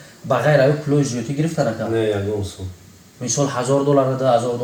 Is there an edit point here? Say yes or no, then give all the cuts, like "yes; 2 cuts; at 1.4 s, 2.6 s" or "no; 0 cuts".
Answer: no; 0 cuts